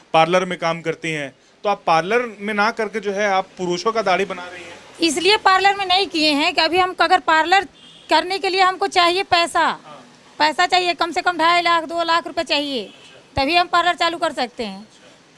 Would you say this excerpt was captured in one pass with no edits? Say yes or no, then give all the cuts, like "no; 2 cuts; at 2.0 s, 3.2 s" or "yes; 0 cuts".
yes; 0 cuts